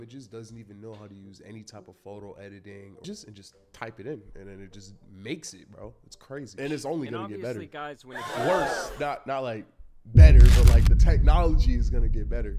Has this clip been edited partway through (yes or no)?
yes